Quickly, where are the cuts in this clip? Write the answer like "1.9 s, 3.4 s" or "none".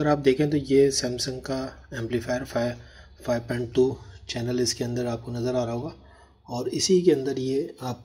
none